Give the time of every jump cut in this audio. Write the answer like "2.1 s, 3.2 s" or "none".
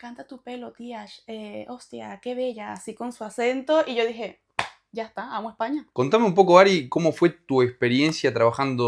5.9 s

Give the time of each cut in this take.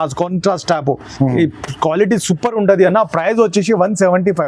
none

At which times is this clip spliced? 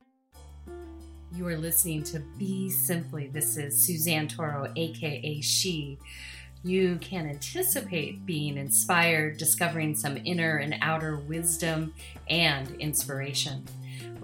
1.3 s

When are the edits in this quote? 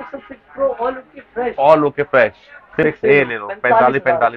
2.8 s

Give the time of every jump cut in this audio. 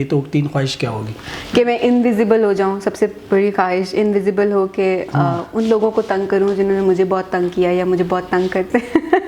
none

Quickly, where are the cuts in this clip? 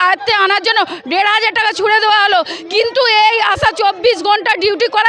none

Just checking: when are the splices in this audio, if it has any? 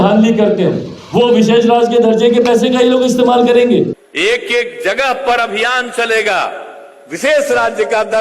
4.0 s

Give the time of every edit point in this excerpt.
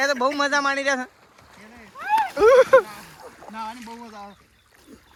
none

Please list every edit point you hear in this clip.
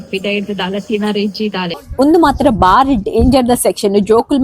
1.8 s

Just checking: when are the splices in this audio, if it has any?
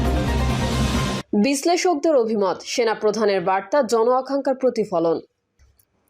1.2 s

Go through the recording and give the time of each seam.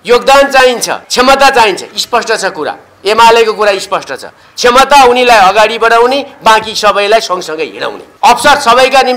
1.0 s, 8.0 s

